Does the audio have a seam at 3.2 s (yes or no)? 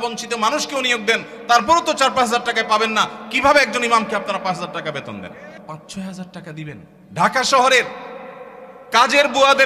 no